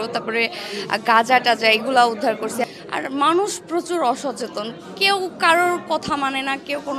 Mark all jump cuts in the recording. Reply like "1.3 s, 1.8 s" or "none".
2.7 s

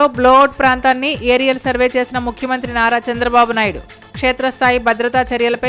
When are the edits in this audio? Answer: none

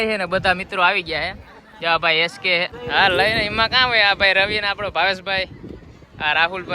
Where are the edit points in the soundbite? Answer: 2.8 s

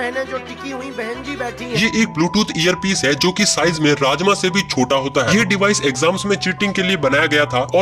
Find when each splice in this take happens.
1.7 s, 5.3 s

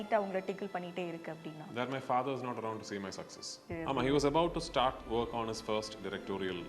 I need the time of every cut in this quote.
3.6 s, 5.0 s

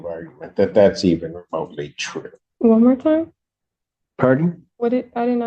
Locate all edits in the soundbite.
2.4 s

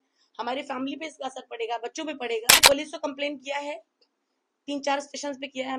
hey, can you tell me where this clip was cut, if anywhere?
2.6 s

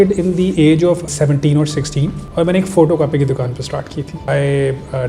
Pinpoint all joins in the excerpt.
1.1 s, 2.2 s, 4.2 s

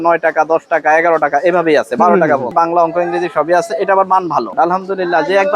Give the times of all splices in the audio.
2.5 s, 4.5 s

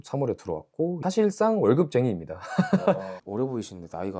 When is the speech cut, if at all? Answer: none

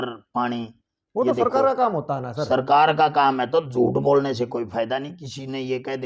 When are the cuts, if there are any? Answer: none

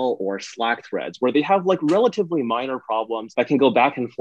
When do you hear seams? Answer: 3.2 s

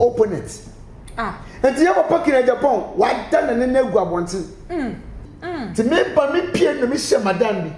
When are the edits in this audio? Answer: 5.1 s

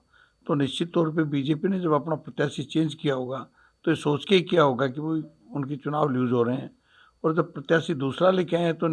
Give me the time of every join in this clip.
none

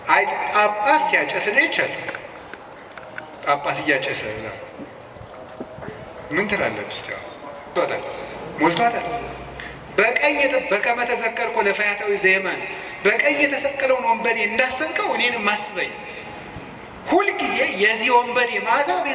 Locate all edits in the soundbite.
7.7 s

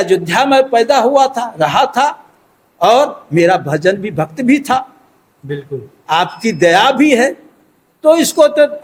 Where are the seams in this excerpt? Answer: none

